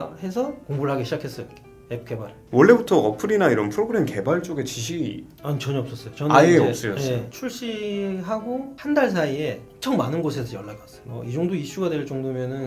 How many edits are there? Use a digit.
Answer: 2